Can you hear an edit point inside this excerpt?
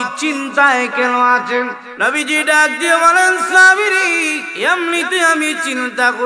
yes; 2 cuts; at 1.8 s, 4.5 s

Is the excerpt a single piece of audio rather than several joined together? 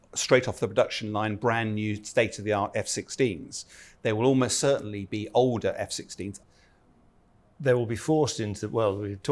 no; 1 cut; at 6.4 s

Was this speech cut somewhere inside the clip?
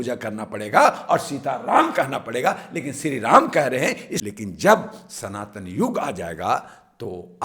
yes; 1 cut; at 4.1 s

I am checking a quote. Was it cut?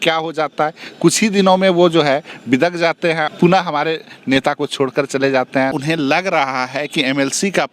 yes; 2 cuts; at 3.3 s, 5.7 s

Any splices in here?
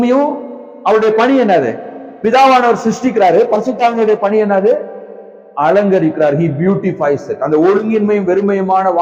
no; 0 cuts

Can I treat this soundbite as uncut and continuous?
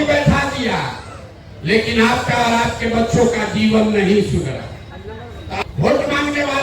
no; 1 cut; at 5.6 s

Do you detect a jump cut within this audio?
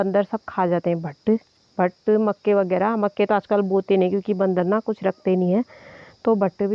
no; 0 cuts

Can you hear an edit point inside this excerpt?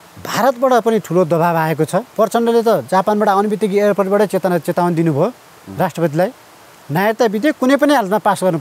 yes; 1 cut; at 2.1 s

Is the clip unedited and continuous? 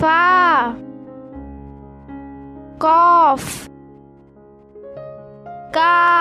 yes; 0 cuts

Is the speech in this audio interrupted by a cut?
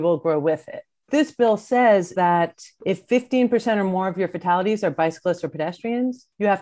yes; 2 cuts; at 1.1 s, 2.1 s

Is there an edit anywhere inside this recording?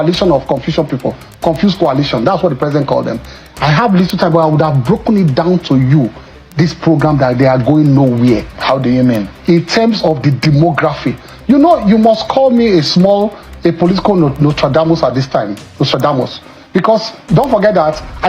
no; 0 cuts

